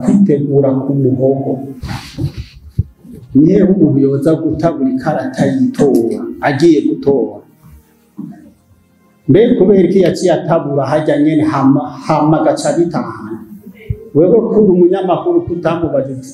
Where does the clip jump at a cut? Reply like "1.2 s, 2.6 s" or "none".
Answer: 1.8 s